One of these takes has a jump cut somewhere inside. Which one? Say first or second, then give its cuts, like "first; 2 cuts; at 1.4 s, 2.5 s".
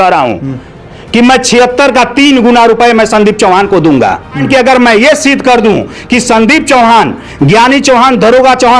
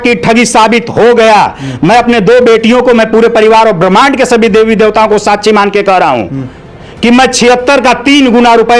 first; 1 cut; at 4.4 s